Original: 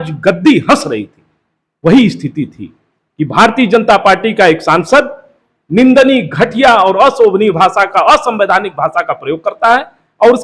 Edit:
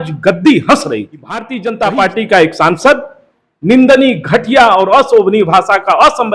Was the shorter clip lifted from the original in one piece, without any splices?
no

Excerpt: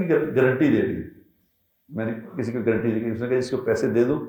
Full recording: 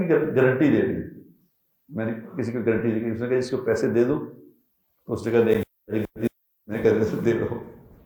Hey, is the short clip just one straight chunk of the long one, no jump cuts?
yes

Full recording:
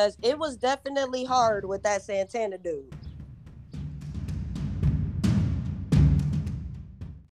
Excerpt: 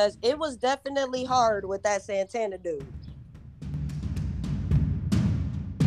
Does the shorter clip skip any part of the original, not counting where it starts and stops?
yes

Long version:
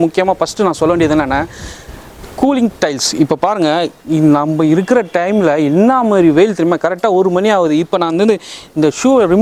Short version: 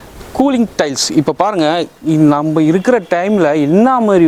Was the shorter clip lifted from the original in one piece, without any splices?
yes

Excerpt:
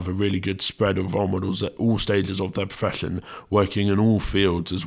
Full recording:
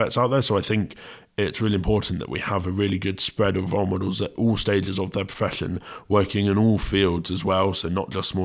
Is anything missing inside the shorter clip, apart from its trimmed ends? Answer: no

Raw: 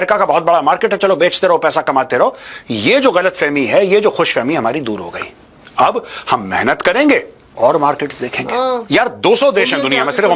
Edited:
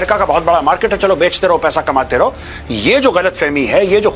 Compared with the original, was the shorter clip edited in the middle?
no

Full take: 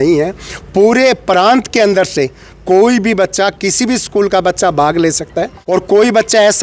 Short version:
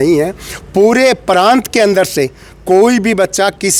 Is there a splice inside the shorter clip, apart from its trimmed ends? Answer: no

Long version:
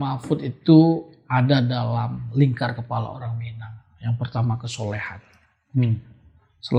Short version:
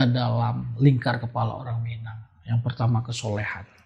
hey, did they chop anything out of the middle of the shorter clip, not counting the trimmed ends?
no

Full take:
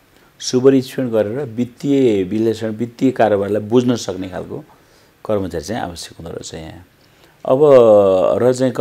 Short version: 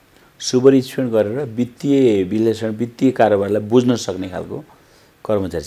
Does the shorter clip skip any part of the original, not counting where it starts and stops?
no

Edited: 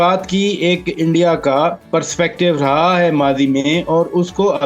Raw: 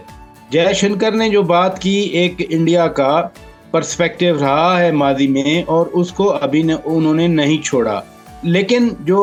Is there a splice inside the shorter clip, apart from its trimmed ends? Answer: yes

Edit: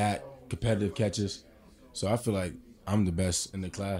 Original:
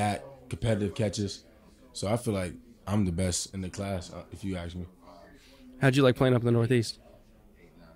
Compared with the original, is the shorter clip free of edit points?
yes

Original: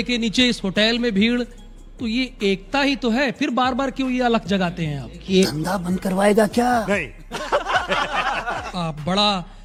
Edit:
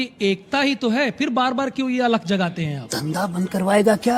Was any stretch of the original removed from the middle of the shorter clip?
yes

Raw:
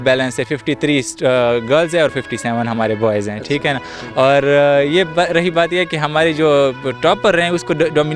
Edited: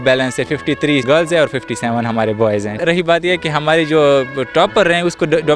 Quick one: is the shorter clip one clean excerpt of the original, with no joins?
no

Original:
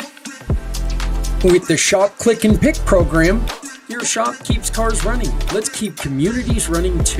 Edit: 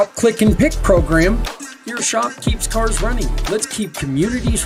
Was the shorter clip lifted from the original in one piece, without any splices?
yes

